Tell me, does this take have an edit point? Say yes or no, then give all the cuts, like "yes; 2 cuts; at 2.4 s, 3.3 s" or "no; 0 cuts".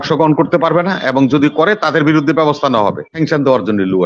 yes; 1 cut; at 3.1 s